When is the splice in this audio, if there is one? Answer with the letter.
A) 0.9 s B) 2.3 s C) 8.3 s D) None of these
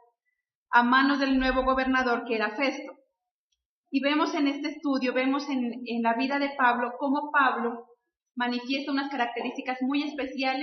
A